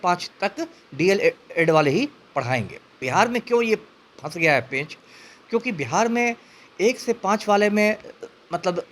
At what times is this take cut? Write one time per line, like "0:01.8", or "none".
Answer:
0:03.0